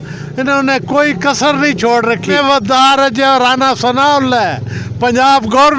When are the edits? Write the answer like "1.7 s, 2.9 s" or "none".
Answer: 2.3 s